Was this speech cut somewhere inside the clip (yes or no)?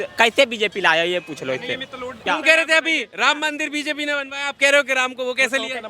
yes